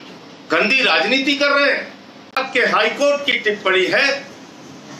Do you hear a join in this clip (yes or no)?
yes